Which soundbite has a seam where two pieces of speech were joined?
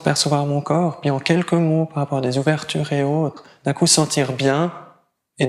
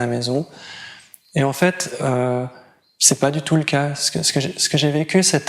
first; 1 cut; at 1.2 s

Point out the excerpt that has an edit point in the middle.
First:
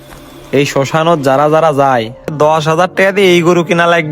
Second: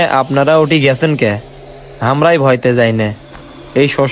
first; 1 cut; at 2.3 s

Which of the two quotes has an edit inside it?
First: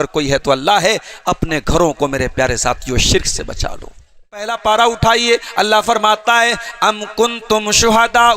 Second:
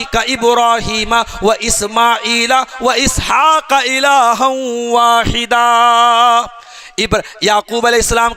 first; 1 cut; at 4.5 s

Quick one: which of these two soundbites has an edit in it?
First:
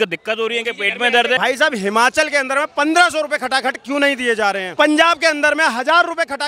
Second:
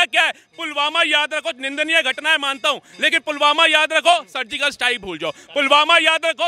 first; 2 cuts; at 1.4 s, 4.6 s

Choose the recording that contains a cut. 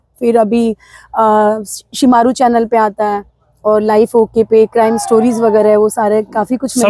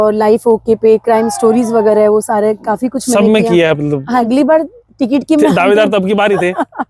second; 1 cut; at 4.2 s

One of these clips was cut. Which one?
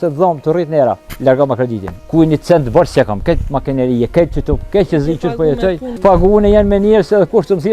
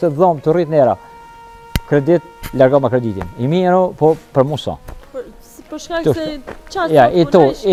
first; 3 cuts; at 1.1 s, 1.9 s, 5.9 s

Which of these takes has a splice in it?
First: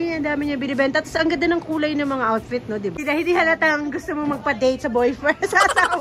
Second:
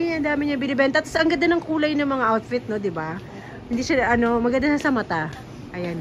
first; 1 cut; at 3.0 s

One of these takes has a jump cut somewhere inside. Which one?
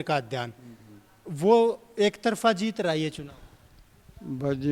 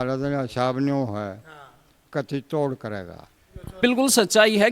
second; 1 cut; at 3.8 s

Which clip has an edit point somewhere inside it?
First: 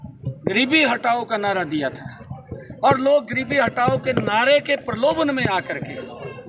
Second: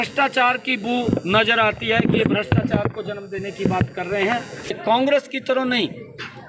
second; 1 cut; at 4.7 s

